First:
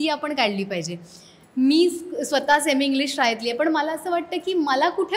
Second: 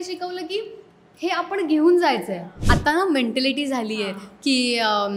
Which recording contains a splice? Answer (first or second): second